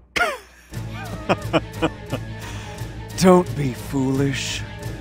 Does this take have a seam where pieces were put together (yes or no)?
yes